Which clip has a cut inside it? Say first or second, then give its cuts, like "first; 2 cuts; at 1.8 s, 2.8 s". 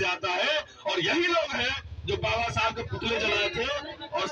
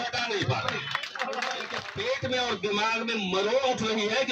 second; 1 cut; at 1.8 s